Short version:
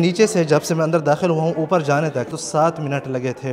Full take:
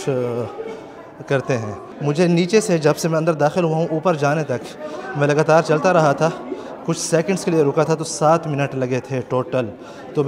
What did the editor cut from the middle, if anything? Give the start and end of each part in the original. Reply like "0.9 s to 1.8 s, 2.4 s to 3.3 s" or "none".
4.7 s to 8.1 s